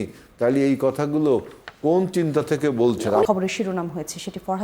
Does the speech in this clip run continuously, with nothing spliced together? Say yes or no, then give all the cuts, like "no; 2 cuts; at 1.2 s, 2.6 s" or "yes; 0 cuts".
no; 1 cut; at 3.3 s